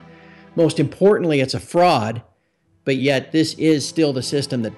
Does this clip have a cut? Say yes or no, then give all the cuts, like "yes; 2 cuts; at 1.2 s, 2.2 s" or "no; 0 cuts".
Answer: no; 0 cuts